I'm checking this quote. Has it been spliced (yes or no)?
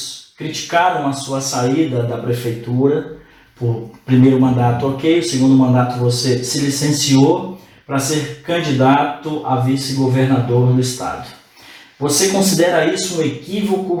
no